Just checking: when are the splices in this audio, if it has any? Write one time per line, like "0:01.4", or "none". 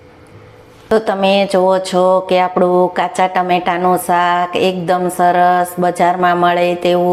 0:00.9